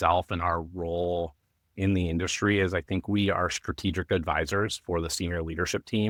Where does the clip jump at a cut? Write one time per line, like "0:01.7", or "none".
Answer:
none